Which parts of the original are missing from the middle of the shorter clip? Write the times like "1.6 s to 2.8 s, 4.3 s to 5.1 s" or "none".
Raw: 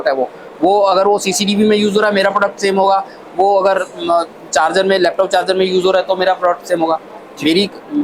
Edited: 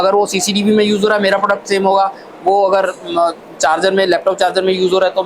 none